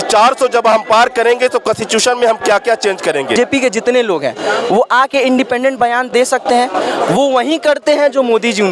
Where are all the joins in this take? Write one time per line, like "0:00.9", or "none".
0:03.4
0:06.1